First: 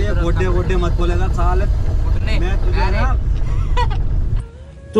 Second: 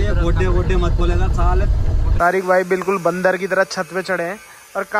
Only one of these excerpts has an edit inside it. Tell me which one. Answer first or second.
second